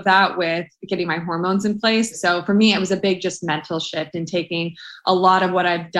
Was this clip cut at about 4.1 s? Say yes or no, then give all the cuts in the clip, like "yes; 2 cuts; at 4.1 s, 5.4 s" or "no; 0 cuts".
no; 1 cut; at 2.1 s